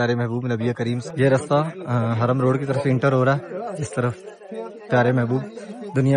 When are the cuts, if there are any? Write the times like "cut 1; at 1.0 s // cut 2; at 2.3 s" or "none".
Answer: cut 1; at 1.0 s